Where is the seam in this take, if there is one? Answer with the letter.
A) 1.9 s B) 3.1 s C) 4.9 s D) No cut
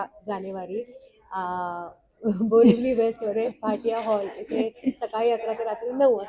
D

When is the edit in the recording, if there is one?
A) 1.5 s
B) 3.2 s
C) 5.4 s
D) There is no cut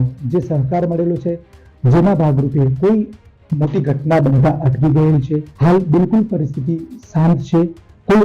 C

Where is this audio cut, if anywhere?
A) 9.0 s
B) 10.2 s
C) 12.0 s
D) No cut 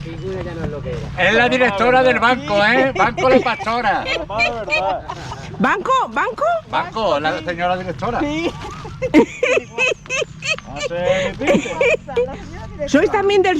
D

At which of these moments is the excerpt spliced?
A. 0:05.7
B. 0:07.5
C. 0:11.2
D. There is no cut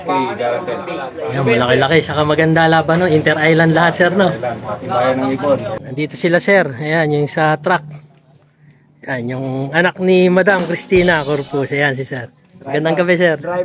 A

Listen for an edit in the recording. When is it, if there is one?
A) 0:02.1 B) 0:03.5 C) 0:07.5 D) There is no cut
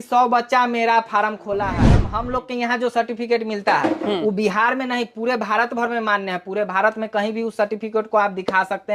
A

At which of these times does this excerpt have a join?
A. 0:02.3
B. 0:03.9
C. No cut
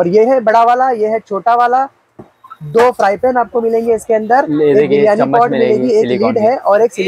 C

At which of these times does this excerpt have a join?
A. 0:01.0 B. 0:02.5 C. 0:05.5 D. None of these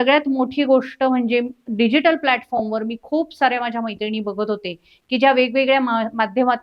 D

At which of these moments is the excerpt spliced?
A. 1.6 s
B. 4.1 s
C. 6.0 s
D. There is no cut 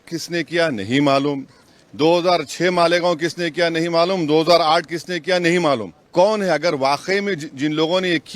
C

